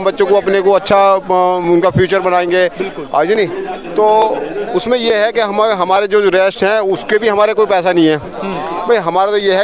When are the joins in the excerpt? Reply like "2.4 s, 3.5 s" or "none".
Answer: none